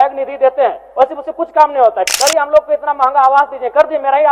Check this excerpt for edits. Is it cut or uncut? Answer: cut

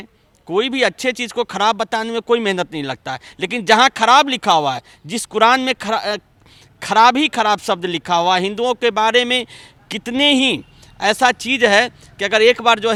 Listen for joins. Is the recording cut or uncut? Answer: uncut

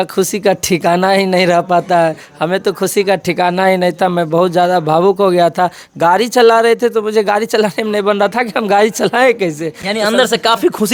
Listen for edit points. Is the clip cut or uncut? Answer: uncut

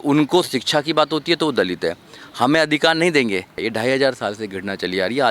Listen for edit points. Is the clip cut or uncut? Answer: cut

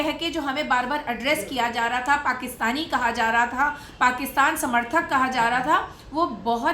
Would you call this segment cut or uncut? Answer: uncut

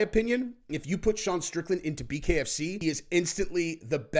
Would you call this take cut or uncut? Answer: cut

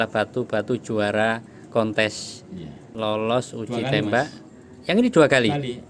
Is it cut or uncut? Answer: cut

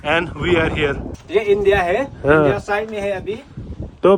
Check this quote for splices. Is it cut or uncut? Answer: cut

